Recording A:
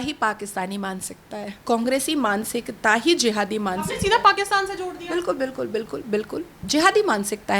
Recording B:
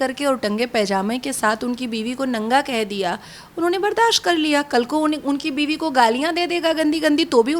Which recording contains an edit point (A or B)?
A